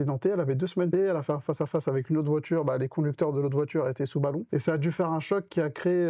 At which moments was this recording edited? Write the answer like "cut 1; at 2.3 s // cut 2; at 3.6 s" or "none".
cut 1; at 0.9 s // cut 2; at 4.4 s